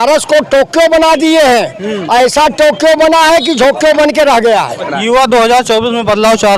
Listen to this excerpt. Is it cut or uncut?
cut